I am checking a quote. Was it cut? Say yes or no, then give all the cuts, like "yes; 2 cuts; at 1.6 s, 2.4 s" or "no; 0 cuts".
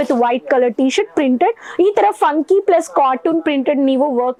no; 0 cuts